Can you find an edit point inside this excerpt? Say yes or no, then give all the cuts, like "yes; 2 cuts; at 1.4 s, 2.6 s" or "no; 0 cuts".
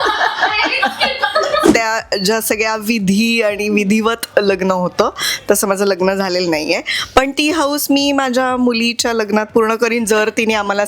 yes; 1 cut; at 1.7 s